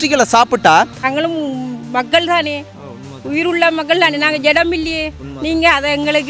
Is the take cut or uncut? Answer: cut